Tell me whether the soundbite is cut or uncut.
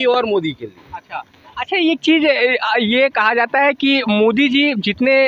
uncut